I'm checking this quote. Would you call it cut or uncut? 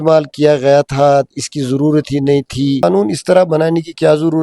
cut